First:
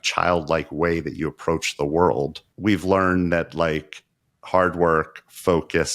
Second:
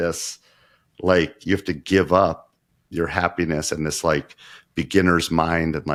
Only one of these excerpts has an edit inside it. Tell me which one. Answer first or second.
first